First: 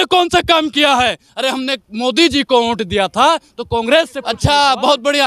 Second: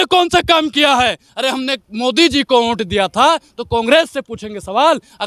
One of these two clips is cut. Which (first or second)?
first